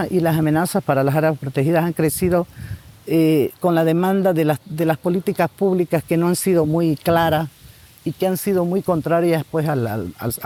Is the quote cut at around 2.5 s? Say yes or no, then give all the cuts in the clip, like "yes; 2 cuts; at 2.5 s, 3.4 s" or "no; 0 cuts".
no; 0 cuts